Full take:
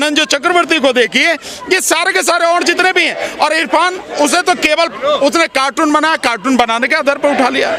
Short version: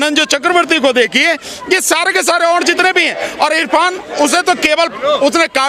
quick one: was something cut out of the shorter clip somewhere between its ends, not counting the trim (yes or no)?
no